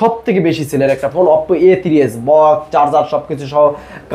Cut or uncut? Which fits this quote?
uncut